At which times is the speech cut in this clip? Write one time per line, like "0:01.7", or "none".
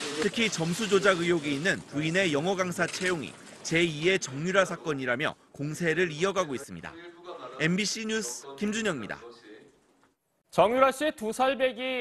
none